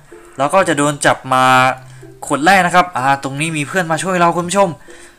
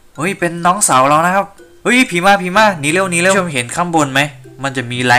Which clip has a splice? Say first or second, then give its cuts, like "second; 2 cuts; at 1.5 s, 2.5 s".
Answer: second; 1 cut; at 3.3 s